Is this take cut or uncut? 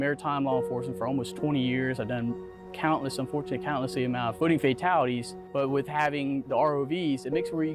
cut